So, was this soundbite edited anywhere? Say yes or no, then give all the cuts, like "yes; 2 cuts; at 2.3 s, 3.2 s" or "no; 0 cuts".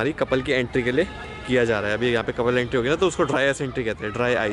no; 0 cuts